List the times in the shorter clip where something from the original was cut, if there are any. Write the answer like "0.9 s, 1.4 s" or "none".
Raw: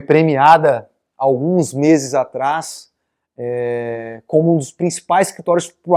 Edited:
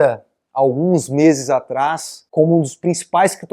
2.2 s